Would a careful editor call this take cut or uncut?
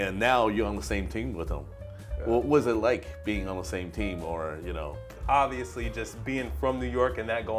cut